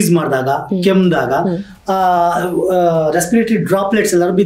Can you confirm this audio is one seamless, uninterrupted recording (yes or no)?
yes